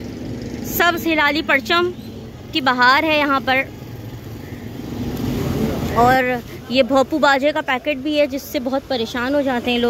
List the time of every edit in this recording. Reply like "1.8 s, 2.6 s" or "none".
5.9 s